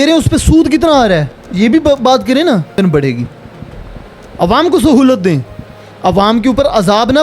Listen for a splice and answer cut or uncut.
cut